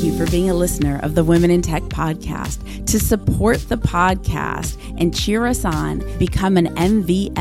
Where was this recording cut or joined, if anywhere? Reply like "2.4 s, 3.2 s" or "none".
none

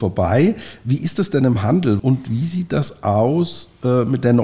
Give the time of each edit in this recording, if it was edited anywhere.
2.0 s

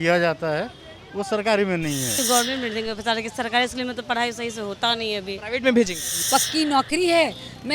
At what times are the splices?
2.2 s, 6.1 s

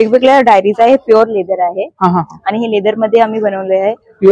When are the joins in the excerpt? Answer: none

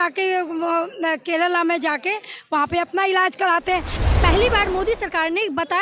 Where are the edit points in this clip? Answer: 4.0 s

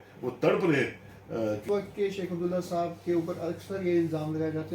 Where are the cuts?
1.6 s

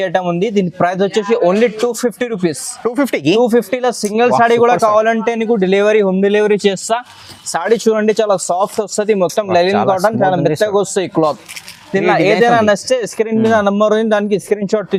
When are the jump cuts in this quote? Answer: none

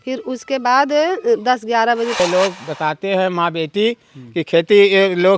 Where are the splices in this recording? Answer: 2.2 s

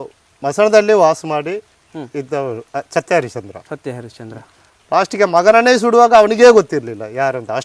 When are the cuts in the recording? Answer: 2.6 s

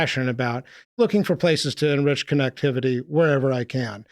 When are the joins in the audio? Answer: 0.9 s

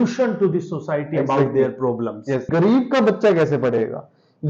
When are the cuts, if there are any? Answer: 2.5 s

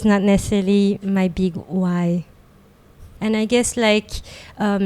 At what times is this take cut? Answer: 3.0 s

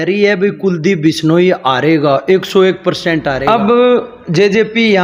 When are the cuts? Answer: 3.4 s

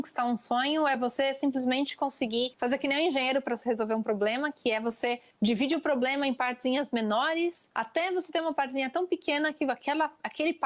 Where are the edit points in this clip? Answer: 2.5 s, 7.7 s

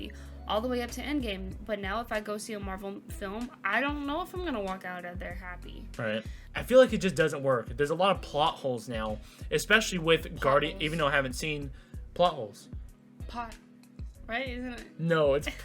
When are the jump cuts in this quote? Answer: 6.4 s

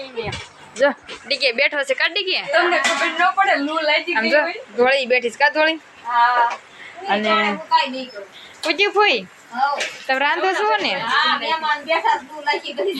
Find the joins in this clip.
none

